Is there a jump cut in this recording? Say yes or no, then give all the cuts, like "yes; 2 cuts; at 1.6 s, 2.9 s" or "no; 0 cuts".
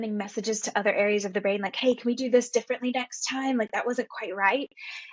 no; 0 cuts